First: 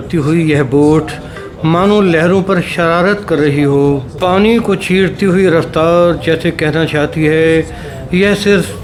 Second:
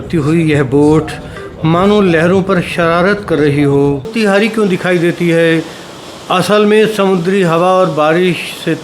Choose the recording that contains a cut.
second; 1 cut; at 4.1 s

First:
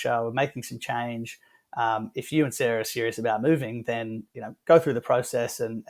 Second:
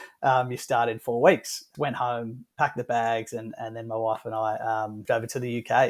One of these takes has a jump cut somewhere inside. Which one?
second; 2 cuts; at 1.7 s, 5.0 s

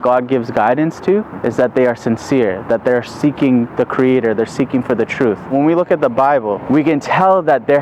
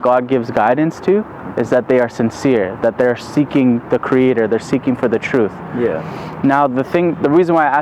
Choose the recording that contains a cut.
first; 3 cuts; at 1.3 s, 5.5 s, 6.6 s

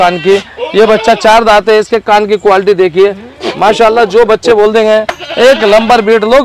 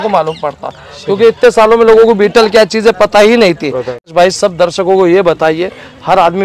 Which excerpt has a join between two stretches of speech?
second; 1 cut; at 4.1 s

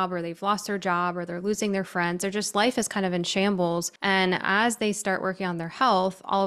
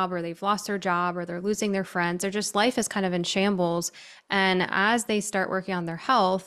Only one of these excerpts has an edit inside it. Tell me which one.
first; 1 cut; at 3.9 s

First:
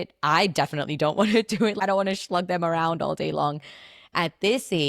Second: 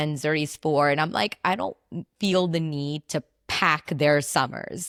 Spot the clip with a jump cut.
first; 1 cut; at 1.8 s

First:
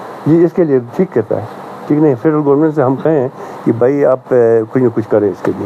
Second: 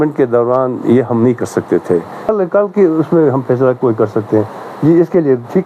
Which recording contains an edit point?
second; 1 cut; at 2.3 s

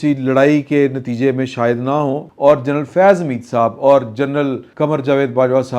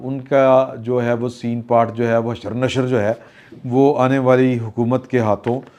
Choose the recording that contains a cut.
first; 2 cuts; at 2.3 s, 4.6 s

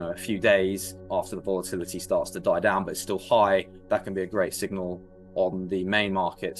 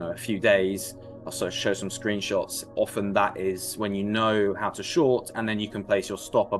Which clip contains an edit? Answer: first; 1 cut; at 1.0 s

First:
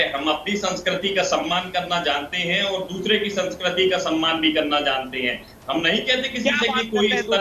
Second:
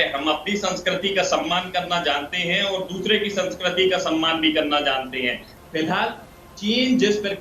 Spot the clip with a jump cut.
second; 1 cut; at 5.5 s

